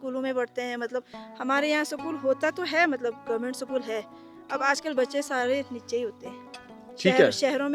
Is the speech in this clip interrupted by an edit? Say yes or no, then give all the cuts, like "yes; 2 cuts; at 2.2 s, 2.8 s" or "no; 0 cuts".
no; 0 cuts